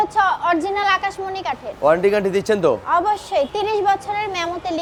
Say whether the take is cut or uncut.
uncut